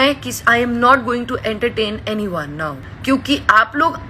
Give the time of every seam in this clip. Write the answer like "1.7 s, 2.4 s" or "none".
2.8 s